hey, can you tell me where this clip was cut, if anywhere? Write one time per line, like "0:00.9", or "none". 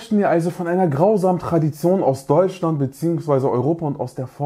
none